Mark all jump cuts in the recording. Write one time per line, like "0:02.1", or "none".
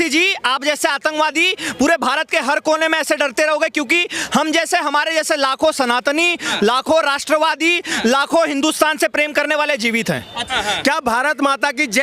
0:10.4